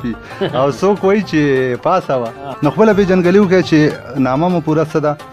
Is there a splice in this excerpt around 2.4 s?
yes; 1 cut; at 2.4 s

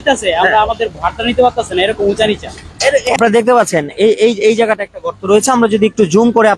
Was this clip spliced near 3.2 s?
yes; 1 cut; at 3.2 s

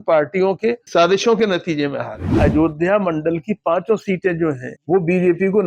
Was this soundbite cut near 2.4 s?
yes; 2 cuts; at 2.4 s, 4.7 s

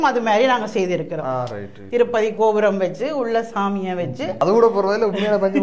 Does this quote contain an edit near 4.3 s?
yes; 1 cut; at 4.3 s

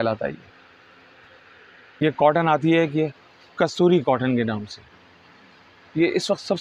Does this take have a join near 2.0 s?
yes; 1 cut; at 2.0 s

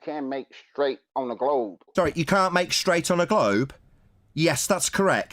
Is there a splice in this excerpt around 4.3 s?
no; 1 cut; at 1.9 s

